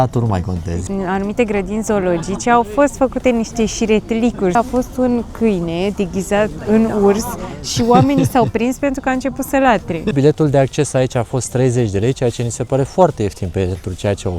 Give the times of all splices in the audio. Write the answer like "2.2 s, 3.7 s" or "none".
0.8 s, 4.5 s, 6.6 s, 10.1 s